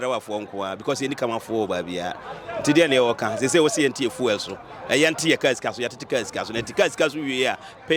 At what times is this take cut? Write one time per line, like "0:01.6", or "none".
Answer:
none